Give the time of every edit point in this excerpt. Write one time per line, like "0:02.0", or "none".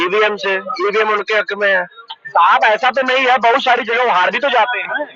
none

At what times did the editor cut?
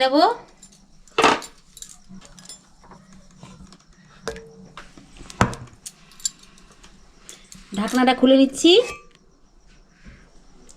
0:02.2

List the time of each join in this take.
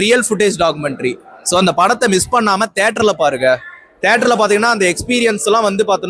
none

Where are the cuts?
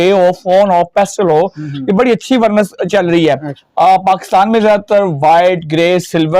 0:03.6

